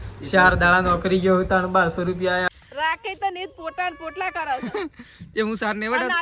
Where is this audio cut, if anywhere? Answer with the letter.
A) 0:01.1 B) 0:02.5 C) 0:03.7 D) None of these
B